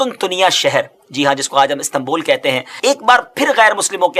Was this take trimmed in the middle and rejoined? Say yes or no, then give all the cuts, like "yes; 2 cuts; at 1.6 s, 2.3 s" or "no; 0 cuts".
yes; 1 cut; at 2.7 s